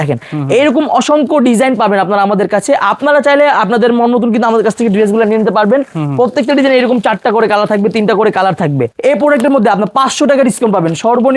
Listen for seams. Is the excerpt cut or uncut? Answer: cut